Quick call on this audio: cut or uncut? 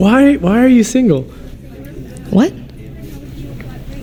uncut